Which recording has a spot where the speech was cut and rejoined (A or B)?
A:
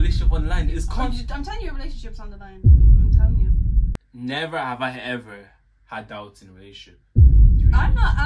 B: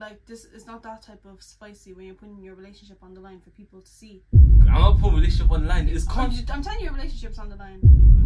A